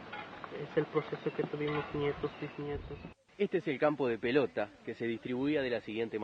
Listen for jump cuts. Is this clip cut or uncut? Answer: cut